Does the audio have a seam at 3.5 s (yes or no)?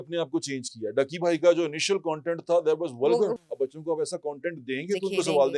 yes